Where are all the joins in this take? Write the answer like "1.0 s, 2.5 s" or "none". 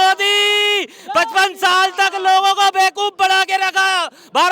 none